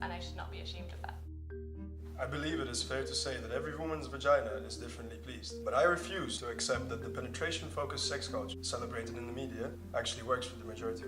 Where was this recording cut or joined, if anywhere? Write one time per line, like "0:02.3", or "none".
0:09.0